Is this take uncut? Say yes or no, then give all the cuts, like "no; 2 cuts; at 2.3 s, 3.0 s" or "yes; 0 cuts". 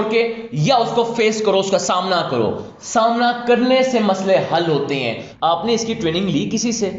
no; 1 cut; at 5.2 s